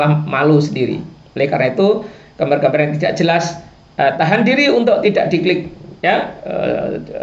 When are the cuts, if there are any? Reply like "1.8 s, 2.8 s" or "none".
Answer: none